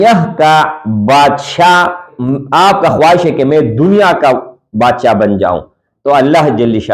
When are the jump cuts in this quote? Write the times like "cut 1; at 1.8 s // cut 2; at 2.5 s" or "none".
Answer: cut 1; at 2.1 s